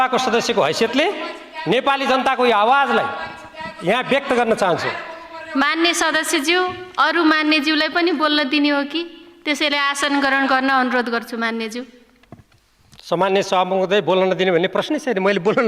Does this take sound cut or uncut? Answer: uncut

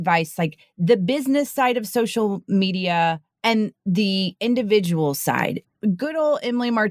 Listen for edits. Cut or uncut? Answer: cut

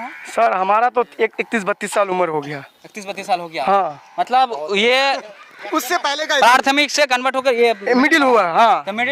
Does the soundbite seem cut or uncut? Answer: uncut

